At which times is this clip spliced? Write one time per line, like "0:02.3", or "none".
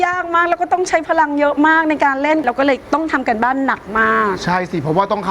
0:02.4